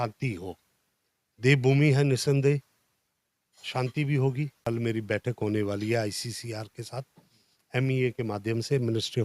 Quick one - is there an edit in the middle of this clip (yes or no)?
yes